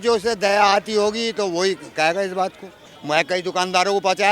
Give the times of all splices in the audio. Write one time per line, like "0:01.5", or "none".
0:02.9